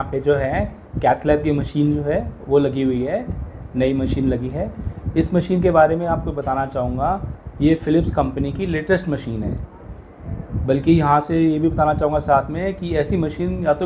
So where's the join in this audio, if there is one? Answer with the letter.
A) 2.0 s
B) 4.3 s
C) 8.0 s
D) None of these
D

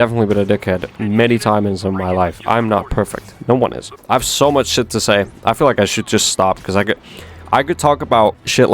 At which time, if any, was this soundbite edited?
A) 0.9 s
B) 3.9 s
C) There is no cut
B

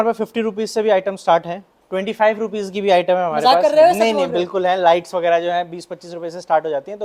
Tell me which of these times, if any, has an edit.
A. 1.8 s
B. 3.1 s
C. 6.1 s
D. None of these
D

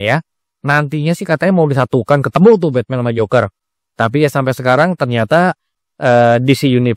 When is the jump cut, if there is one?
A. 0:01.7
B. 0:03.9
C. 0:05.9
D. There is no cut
D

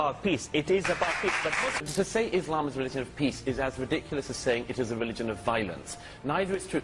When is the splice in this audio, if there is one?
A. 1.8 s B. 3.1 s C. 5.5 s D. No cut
A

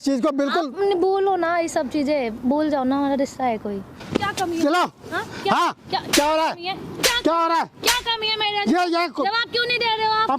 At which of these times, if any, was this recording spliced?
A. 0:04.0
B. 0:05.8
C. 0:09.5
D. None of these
A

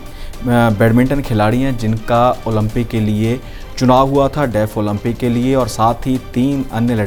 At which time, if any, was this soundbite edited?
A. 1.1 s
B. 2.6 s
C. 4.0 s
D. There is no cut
D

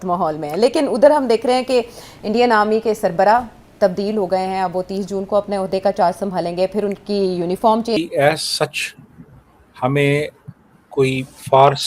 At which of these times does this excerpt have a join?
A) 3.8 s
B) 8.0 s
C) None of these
B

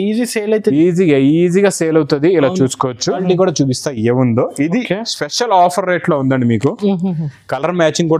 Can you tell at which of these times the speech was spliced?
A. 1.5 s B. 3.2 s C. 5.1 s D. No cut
B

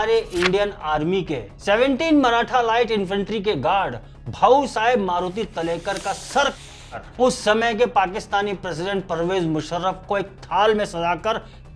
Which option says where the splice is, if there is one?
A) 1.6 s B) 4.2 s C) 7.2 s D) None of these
D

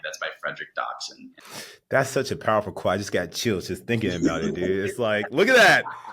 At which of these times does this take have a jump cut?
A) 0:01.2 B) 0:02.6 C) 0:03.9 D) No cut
A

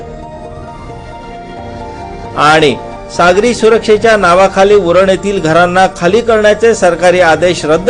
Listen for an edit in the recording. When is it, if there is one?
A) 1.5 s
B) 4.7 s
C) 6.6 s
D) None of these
A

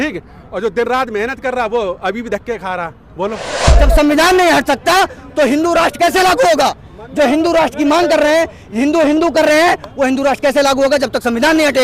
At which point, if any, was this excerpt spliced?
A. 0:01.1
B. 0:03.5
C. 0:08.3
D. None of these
B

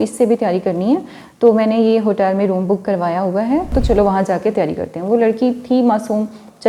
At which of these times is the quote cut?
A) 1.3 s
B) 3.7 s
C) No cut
B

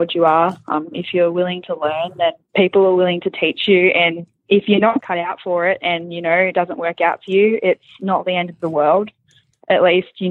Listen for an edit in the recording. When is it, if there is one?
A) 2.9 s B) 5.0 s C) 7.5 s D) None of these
B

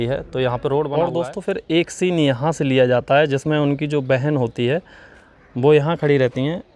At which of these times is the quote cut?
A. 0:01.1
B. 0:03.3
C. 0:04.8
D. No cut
A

